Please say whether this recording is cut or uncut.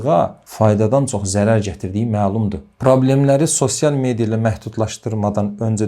cut